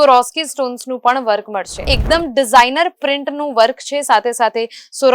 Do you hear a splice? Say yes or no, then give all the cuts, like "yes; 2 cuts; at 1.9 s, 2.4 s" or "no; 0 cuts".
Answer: yes; 1 cut; at 1.9 s